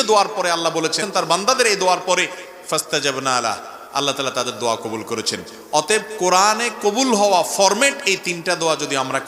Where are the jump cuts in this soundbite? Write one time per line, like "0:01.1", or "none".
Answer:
0:01.0